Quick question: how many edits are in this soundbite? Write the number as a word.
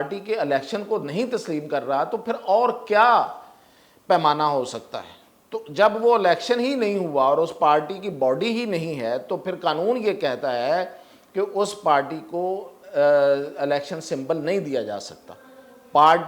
zero